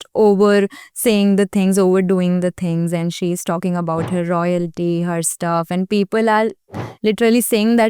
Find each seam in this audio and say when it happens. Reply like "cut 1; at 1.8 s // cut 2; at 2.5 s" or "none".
none